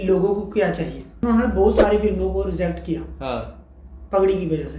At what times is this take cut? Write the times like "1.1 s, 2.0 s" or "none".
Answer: 1.2 s